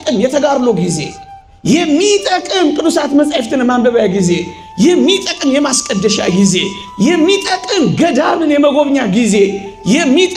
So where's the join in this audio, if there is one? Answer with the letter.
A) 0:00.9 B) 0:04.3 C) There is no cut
C